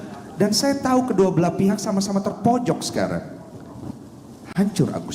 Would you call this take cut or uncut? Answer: uncut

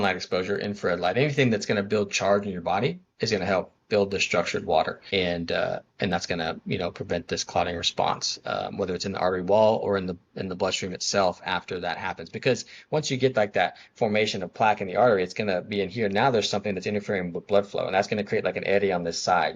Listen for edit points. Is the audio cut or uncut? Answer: cut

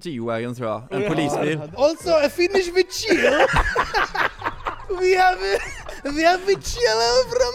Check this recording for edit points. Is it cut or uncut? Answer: cut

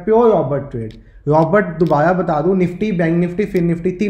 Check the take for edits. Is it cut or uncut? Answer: uncut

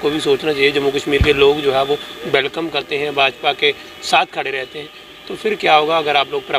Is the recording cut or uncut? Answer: uncut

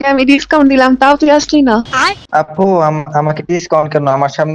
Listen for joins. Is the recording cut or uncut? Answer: cut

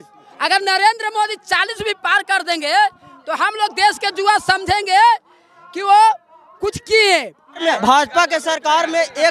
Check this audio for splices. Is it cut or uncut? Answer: cut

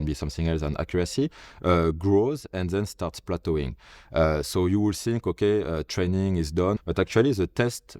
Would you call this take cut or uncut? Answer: cut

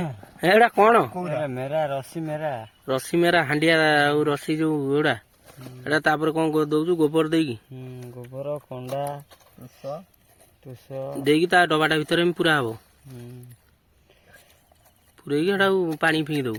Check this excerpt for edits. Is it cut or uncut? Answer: uncut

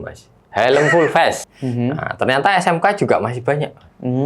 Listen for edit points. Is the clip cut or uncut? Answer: cut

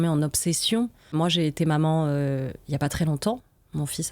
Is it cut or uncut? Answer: cut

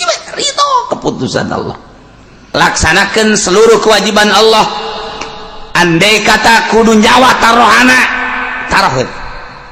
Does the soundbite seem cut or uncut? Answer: cut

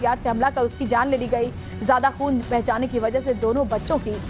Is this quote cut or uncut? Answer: cut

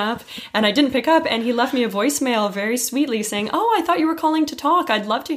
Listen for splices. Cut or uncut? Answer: uncut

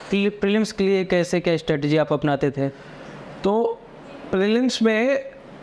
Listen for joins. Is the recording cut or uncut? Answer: uncut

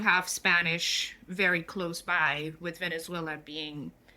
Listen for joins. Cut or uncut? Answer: uncut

